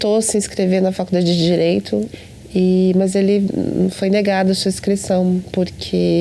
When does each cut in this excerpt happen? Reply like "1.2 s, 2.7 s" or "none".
2.1 s